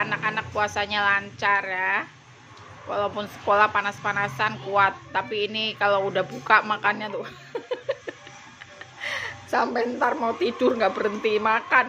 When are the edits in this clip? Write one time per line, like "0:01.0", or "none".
none

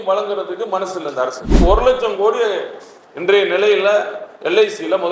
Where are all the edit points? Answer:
0:01.6

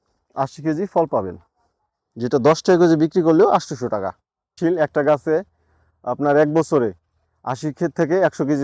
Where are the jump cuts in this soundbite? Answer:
0:04.6

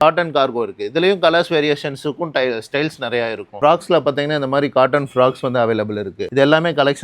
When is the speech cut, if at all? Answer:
0:03.6

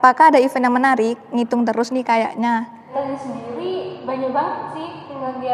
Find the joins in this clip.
0:02.9

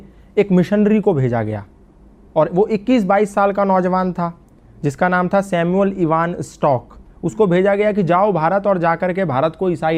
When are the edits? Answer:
none

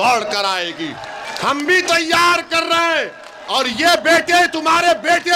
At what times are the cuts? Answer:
0:01.2

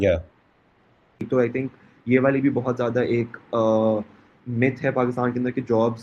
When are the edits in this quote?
0:01.3

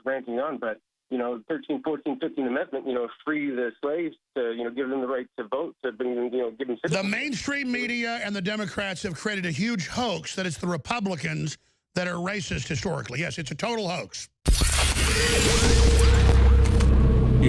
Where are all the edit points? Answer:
0:14.2

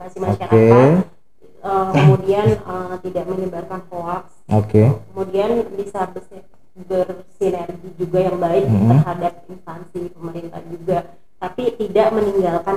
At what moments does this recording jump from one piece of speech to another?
none

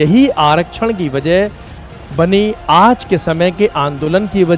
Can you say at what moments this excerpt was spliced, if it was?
none

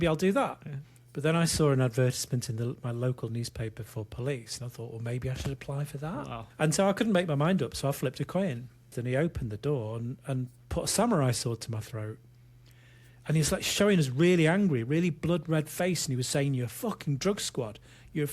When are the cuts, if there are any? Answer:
0:06.4
0:08.9

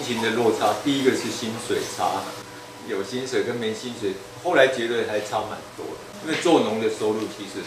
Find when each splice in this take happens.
0:06.1

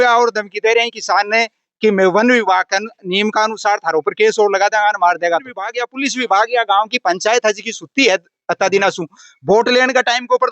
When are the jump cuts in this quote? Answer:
0:05.8

